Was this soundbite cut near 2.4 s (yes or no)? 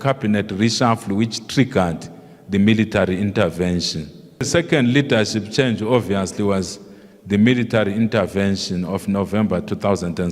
no